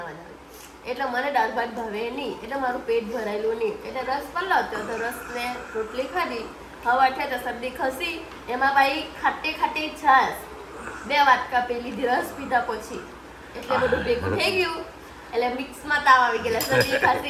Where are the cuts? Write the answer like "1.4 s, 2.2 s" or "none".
none